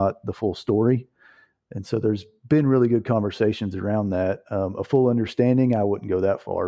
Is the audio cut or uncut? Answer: uncut